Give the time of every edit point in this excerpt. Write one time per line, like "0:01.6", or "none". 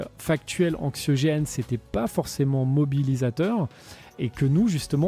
0:04.2

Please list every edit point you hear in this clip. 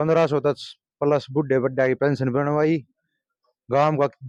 none

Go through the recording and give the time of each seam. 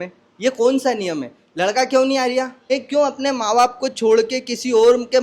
0:02.7

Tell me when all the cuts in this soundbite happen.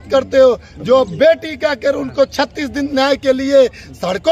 none

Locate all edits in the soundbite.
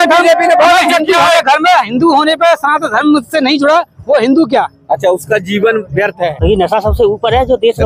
0:06.2

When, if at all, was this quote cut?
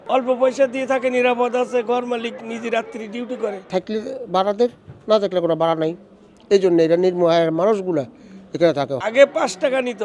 0:03.7
0:09.0

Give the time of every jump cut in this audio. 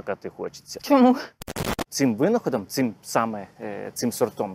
0:01.6

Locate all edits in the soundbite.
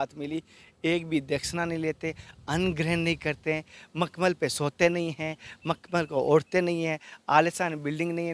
none

